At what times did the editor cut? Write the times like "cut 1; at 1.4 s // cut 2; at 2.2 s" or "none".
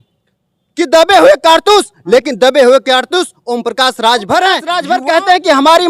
cut 1; at 4.7 s